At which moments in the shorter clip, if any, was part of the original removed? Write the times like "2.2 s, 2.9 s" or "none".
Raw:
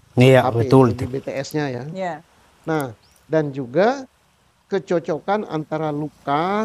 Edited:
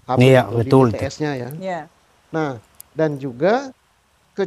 0.9 s